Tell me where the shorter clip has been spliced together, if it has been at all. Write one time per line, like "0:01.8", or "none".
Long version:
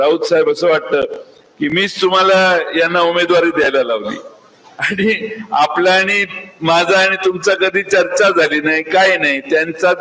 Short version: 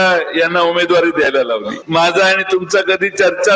0:01.8